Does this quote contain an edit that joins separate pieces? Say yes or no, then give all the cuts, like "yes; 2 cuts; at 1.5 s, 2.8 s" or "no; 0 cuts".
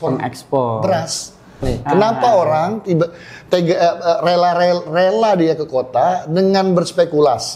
yes; 1 cut; at 1.7 s